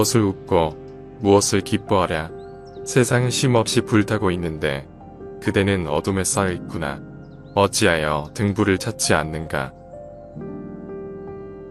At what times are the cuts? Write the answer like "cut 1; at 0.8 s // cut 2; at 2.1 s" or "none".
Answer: cut 1; at 10.0 s